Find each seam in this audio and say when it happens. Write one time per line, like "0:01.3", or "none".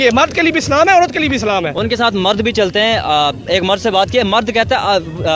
none